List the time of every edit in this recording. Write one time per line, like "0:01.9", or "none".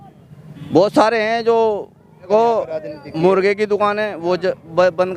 0:02.3